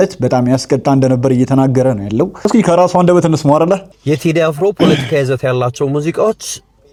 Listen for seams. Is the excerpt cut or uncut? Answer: uncut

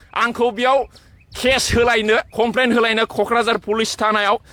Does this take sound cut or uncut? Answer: uncut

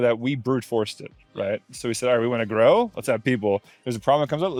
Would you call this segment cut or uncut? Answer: uncut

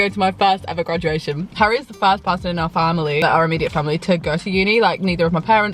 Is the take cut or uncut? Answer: uncut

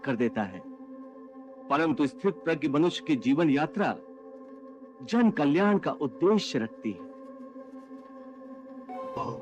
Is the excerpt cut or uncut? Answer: uncut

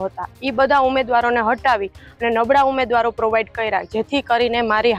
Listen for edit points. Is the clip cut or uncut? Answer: uncut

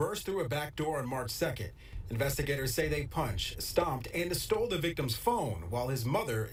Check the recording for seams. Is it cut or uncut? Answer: uncut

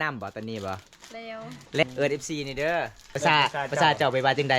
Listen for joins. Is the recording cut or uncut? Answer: cut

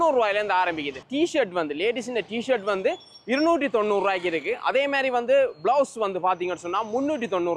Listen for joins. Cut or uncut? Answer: uncut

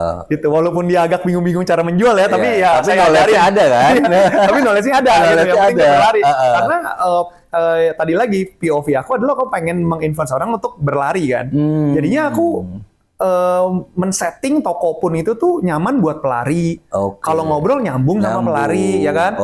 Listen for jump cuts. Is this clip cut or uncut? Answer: uncut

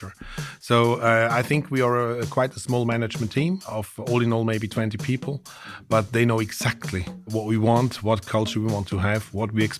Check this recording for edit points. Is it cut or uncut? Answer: cut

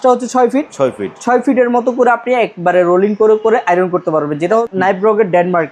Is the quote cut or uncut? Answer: cut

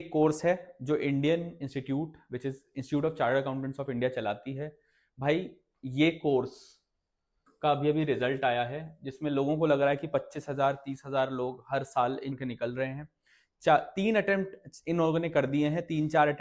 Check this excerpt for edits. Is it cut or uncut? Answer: cut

